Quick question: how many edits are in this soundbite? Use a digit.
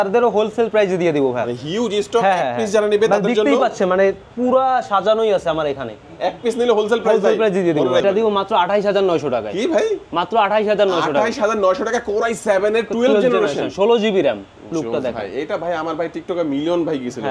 2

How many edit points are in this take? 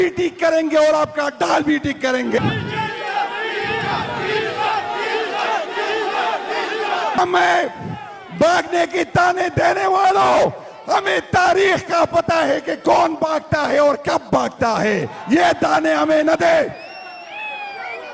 2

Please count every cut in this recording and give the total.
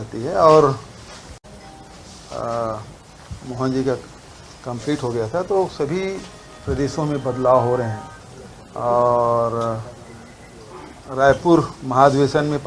1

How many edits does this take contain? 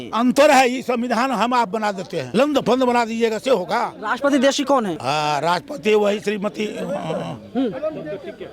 3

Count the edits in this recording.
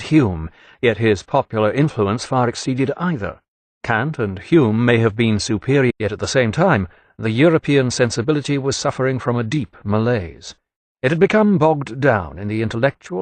0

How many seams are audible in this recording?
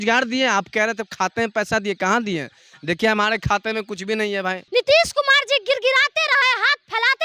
1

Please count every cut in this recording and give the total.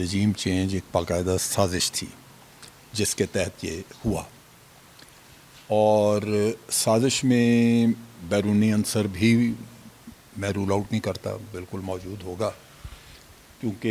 0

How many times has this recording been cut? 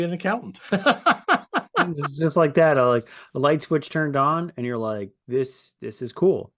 0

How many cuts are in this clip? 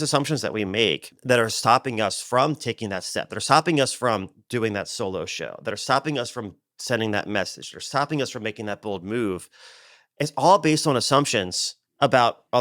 1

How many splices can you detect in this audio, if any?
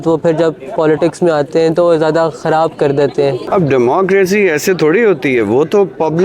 1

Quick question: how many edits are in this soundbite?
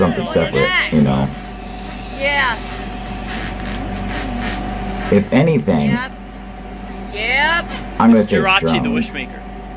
0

